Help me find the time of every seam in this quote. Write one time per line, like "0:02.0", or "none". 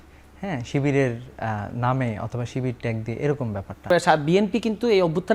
0:03.9

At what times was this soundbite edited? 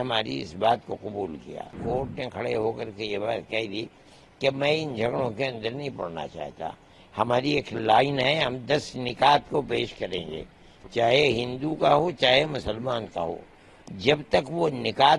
0:01.8

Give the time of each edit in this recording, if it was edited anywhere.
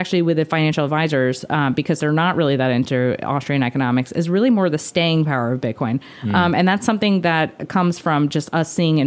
none

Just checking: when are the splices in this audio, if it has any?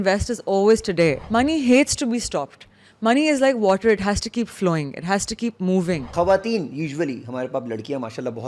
0:01.2
0:06.1

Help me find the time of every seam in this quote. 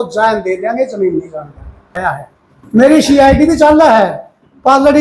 0:02.0

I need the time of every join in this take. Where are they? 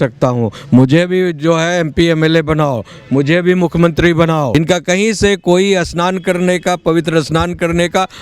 0:04.5

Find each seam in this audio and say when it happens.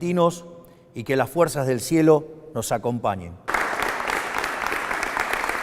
0:03.5

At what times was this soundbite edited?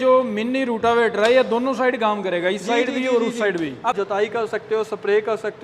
0:04.0

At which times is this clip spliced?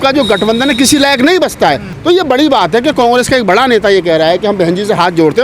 0:01.9

